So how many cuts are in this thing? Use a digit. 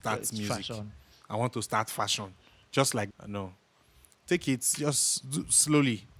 1